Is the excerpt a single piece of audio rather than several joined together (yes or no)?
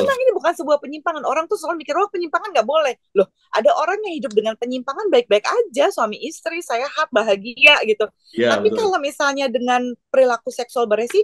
yes